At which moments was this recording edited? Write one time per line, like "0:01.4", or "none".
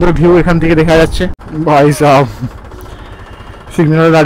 0:01.4